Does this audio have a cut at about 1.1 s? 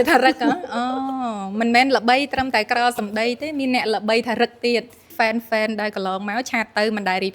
no; 1 cut; at 5.1 s

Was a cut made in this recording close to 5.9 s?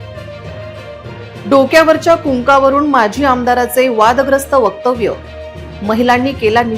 no; 1 cut; at 1.4 s

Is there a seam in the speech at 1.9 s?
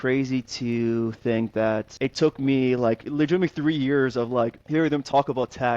yes; 2 cuts; at 1.9 s, 4.6 s

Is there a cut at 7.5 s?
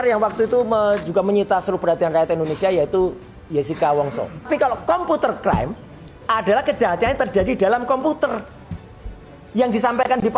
no; 1 cut; at 4.5 s

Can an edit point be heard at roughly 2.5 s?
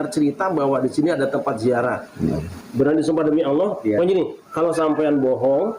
yes; 1 cut; at 2.5 s

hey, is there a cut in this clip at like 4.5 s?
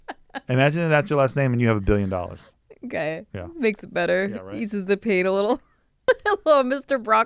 no; 1 cut; at 5.9 s

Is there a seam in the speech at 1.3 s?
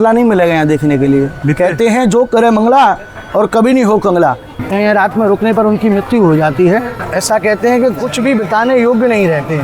yes; 3 cuts; at 1.3 s, 4.6 s, 7.0 s

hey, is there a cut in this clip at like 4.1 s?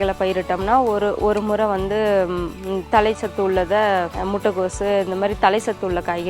yes; 1 cut; at 4.1 s

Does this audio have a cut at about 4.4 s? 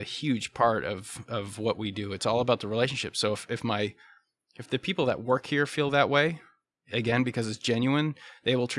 no; 0 cuts

